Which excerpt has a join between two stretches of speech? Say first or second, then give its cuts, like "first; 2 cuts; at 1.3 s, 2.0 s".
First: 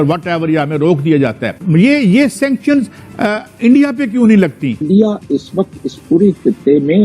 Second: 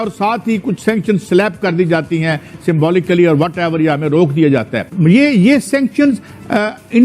first; 1 cut; at 4.8 s